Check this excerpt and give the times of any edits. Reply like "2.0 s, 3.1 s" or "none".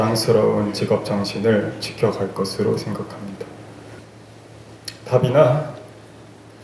4.0 s